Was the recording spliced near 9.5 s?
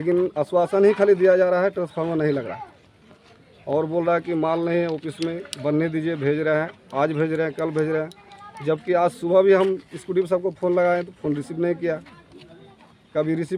no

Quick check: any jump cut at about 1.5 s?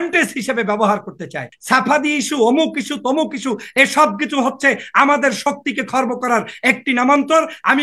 yes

